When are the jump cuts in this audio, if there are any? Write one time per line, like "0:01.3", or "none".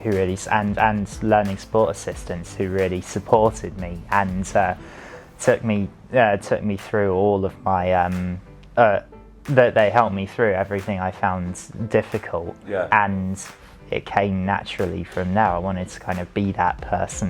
0:13.7